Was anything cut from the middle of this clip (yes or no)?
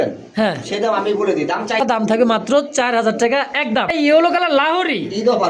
yes